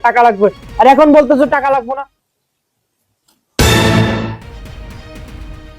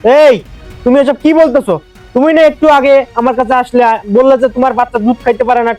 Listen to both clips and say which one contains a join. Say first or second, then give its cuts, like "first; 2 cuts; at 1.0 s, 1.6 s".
first; 1 cut; at 1.8 s